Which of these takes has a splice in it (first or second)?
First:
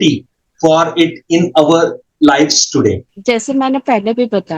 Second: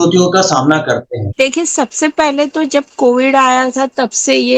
second